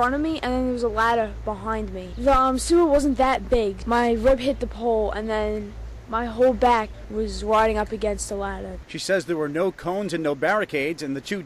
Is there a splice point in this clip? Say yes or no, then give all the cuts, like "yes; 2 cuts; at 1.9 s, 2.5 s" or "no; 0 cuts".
no; 0 cuts